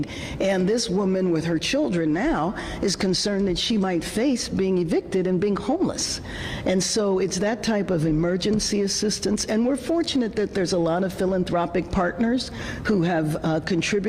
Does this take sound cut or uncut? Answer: uncut